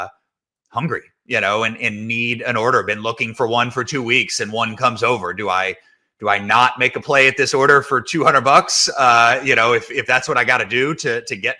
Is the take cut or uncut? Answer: uncut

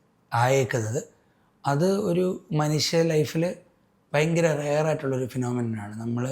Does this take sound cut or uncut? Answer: uncut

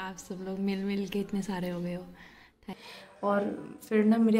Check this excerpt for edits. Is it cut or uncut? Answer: cut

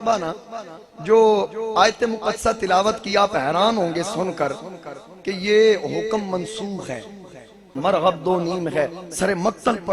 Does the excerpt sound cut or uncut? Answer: cut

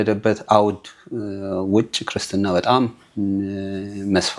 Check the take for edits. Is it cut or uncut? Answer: uncut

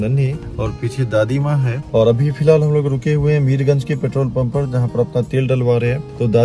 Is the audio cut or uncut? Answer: uncut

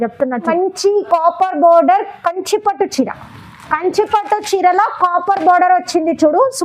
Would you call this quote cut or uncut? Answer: cut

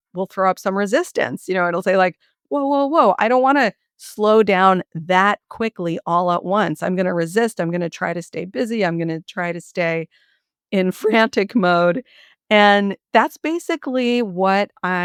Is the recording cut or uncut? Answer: uncut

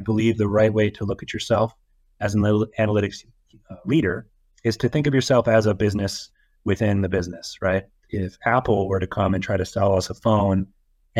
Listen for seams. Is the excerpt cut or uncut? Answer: cut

